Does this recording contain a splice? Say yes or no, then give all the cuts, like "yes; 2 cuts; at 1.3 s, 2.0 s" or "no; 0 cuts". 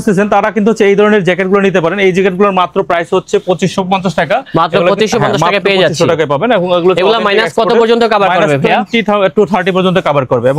no; 0 cuts